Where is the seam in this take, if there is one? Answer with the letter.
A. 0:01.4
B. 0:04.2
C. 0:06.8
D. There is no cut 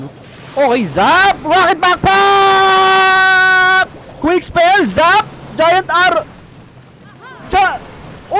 D